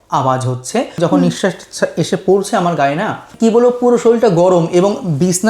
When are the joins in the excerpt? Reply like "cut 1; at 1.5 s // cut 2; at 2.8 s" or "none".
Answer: cut 1; at 0.9 s // cut 2; at 3.3 s